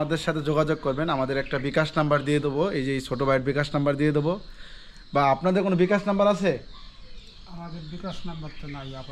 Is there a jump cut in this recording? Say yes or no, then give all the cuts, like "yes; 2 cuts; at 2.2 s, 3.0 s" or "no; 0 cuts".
no; 0 cuts